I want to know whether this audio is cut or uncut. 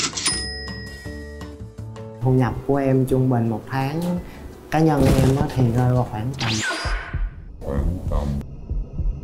cut